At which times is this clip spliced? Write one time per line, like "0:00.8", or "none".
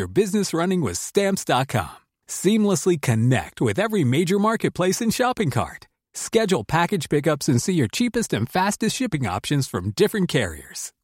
none